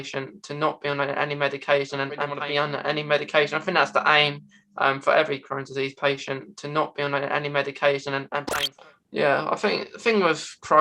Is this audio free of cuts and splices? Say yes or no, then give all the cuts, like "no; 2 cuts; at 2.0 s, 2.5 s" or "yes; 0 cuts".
no; 2 cuts; at 2.3 s, 8.4 s